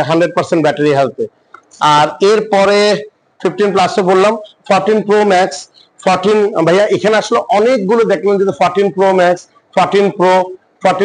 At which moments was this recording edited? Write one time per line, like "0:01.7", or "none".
none